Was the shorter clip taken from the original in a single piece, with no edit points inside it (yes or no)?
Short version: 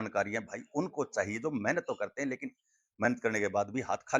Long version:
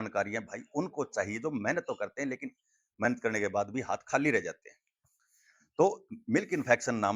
yes